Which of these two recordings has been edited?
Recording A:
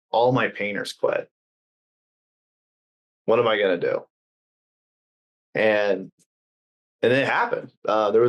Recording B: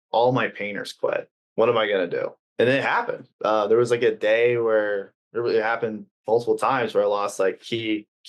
B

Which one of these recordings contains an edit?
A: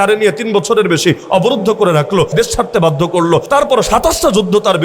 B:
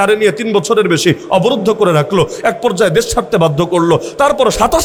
A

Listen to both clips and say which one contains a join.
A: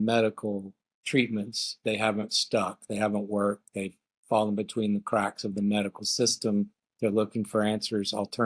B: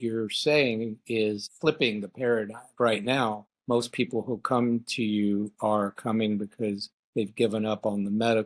B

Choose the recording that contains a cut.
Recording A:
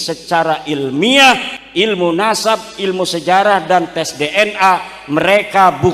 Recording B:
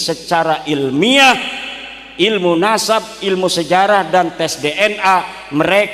A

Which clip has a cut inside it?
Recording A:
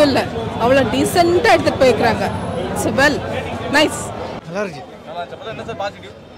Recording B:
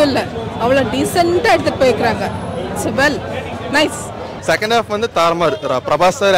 B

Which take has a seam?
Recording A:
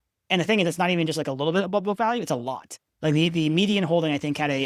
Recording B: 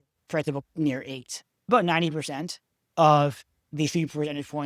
B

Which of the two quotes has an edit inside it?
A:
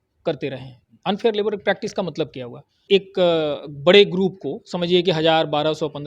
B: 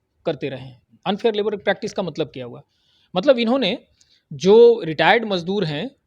A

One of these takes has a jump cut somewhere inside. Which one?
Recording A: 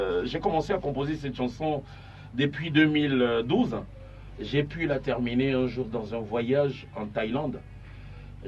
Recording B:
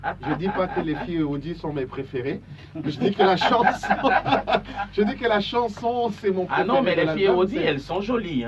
B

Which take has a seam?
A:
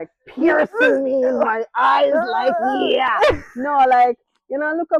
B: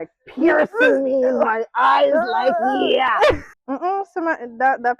B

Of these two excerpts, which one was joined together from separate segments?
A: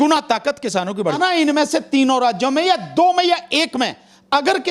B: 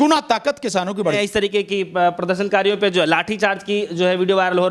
A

